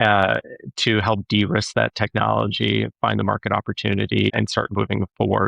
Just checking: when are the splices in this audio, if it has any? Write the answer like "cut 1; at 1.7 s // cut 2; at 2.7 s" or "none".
cut 1; at 4.3 s